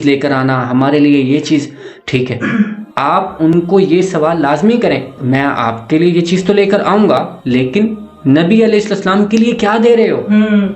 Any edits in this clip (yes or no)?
no